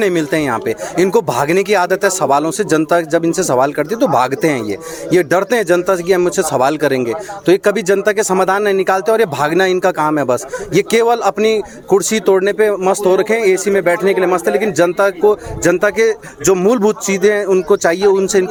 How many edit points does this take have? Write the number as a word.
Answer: zero